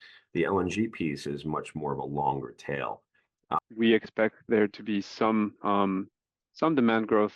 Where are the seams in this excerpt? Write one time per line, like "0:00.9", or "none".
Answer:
0:03.6